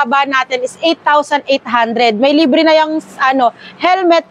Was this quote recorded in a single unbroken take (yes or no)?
yes